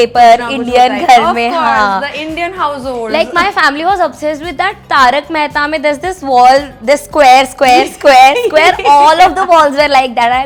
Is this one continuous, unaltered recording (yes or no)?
yes